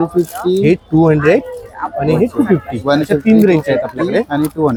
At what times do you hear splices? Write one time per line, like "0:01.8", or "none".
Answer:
none